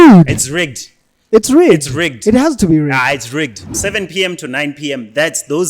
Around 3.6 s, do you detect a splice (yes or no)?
yes